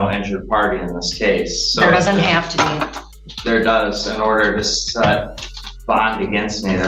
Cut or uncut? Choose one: uncut